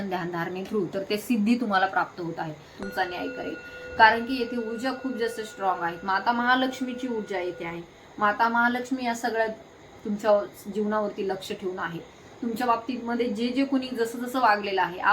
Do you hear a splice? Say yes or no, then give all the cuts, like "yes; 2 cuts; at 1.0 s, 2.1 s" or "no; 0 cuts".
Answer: yes; 1 cut; at 2.8 s